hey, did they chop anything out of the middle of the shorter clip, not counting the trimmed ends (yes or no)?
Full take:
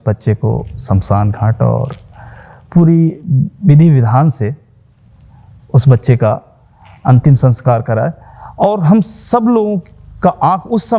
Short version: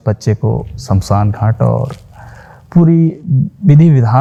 no